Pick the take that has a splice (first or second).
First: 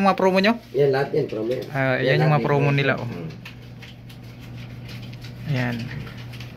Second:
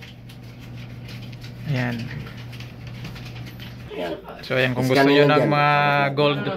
second